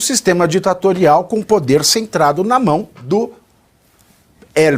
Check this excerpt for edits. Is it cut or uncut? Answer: cut